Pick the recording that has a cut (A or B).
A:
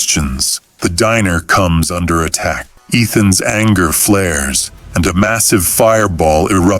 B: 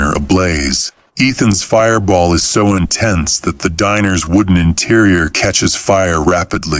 A